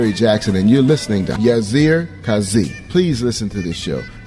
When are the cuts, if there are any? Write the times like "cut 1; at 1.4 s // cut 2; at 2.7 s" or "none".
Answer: cut 1; at 1.0 s

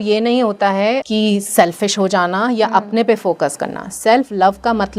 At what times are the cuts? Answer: cut 1; at 1.0 s

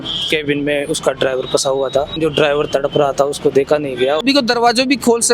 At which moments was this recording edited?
cut 1; at 2.2 s // cut 2; at 4.2 s

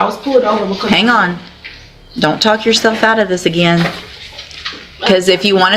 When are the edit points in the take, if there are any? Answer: none

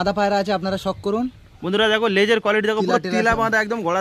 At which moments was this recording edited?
none

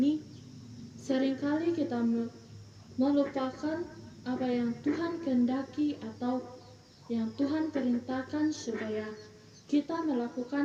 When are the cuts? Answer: none

